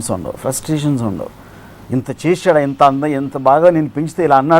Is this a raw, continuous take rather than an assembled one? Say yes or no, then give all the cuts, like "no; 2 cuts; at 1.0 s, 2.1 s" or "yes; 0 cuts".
yes; 0 cuts